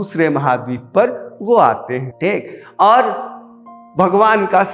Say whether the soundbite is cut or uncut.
uncut